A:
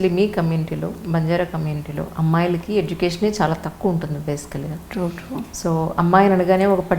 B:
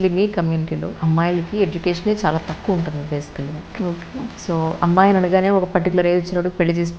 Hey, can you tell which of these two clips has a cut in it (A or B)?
B